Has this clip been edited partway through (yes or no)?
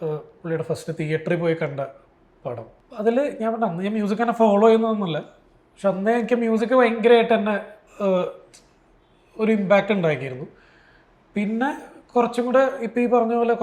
no